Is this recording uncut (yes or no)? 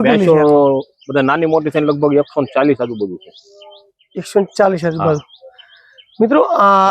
yes